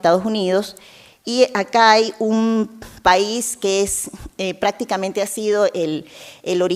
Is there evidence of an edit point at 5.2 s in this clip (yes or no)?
yes